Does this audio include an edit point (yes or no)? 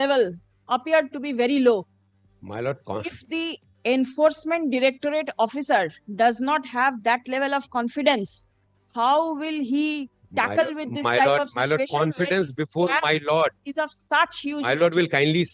no